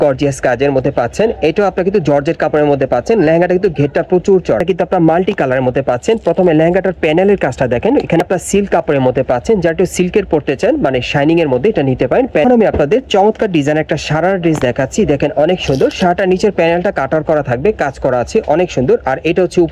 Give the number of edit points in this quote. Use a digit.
3